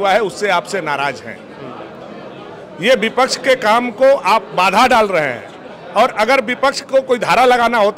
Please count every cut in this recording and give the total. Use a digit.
0